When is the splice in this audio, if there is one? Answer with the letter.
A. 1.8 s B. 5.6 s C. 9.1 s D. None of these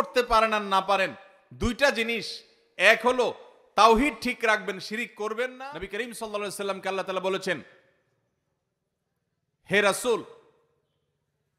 B